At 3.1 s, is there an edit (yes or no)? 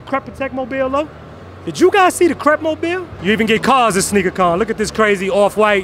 yes